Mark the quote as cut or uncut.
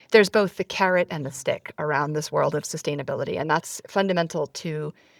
uncut